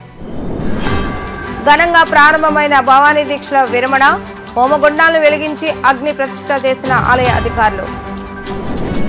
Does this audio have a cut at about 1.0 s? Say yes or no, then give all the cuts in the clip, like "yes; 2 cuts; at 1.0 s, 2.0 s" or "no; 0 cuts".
yes; 1 cut; at 1.0 s